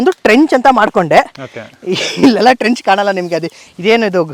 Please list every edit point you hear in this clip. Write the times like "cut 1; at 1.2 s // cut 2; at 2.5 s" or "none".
none